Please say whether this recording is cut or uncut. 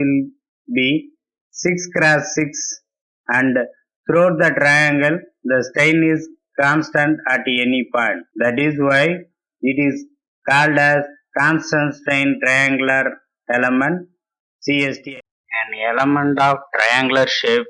cut